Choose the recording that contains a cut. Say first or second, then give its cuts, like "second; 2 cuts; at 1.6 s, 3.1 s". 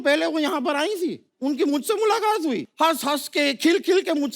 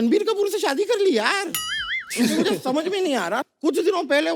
first; 2 cuts; at 1.3 s, 2.7 s